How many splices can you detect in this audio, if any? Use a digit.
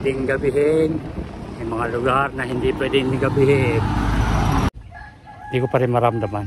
1